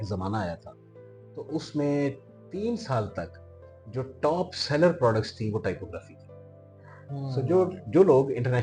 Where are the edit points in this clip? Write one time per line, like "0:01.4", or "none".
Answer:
none